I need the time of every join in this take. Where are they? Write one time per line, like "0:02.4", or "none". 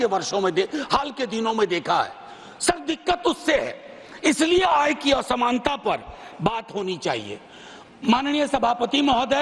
none